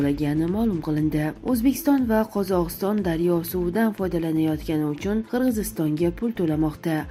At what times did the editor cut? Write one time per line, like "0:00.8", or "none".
none